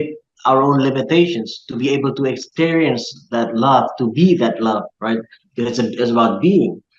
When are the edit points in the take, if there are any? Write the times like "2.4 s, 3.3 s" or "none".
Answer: none